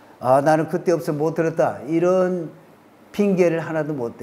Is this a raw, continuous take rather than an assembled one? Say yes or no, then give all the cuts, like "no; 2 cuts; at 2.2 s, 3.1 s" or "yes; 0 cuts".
yes; 0 cuts